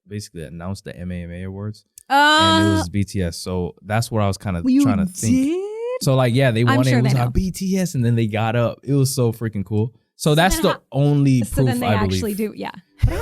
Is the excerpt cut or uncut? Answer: cut